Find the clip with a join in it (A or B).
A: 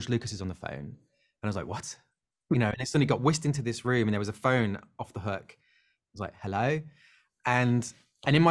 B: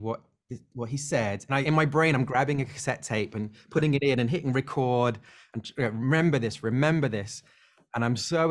B